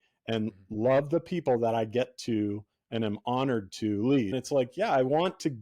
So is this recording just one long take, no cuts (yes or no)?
no